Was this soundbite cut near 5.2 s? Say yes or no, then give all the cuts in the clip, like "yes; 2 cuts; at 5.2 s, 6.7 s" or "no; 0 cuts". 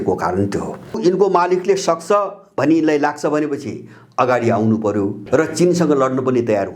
yes; 2 cuts; at 1.0 s, 5.2 s